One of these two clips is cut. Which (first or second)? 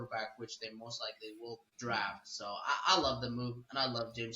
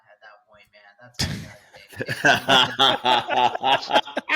first